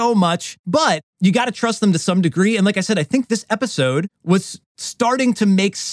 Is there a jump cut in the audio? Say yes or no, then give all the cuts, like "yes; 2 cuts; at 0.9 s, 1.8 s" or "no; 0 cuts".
yes; 2 cuts; at 0.8 s, 4.4 s